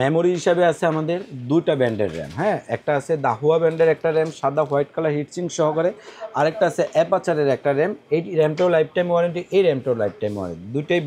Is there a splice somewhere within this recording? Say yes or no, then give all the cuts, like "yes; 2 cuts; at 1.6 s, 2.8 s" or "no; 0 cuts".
no; 0 cuts